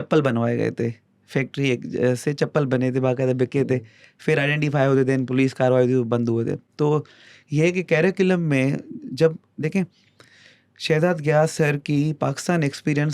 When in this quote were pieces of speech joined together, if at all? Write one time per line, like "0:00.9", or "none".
none